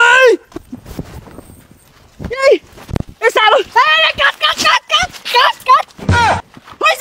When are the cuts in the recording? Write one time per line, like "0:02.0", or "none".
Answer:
none